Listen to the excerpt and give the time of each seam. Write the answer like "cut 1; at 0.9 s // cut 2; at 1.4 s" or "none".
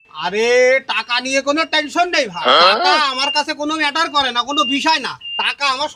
none